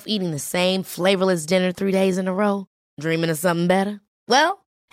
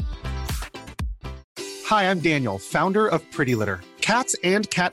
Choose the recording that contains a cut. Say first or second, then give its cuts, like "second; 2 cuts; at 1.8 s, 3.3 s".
second; 1 cut; at 1.4 s